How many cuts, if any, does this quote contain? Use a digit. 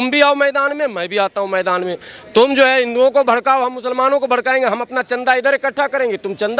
0